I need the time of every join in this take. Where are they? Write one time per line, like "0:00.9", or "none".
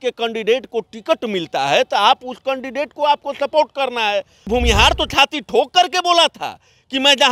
0:04.5